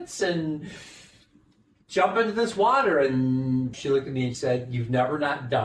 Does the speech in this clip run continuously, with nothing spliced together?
no; 1 cut; at 3.8 s

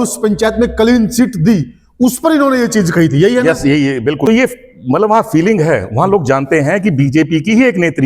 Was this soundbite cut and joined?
yes; 1 cut; at 4.2 s

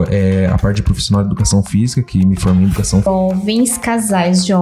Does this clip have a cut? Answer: yes; 1 cut; at 3.1 s

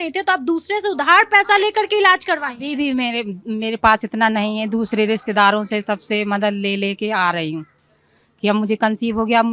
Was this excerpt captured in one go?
yes; 0 cuts

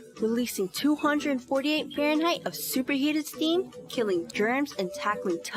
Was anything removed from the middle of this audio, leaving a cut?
no; 0 cuts

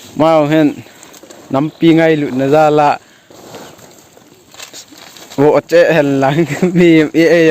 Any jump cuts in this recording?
no; 0 cuts

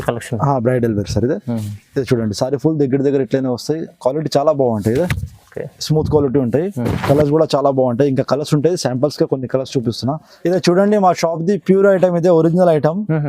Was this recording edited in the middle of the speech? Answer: yes; 1 cut; at 10.3 s

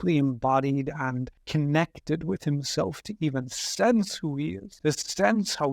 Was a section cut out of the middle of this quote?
yes; 2 cuts; at 1.3 s, 4.6 s

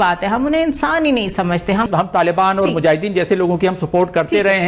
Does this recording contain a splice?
yes; 1 cut; at 1.9 s

